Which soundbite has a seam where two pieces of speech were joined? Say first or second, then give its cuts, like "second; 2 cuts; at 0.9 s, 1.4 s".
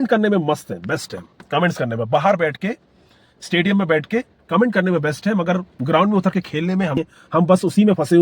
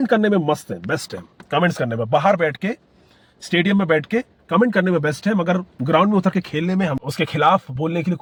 first; 1 cut; at 7.1 s